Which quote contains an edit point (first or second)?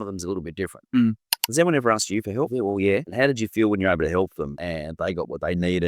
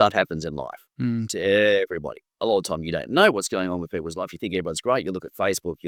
first